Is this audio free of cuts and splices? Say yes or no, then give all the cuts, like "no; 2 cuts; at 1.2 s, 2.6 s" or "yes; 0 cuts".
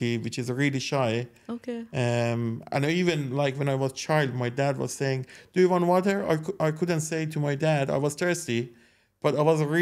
yes; 0 cuts